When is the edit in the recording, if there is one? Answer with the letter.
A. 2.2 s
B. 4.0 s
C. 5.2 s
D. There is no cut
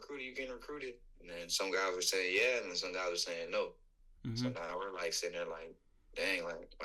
D